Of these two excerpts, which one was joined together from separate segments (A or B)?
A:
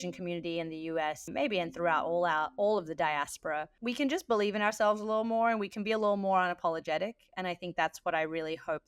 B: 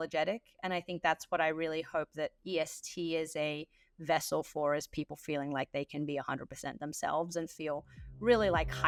A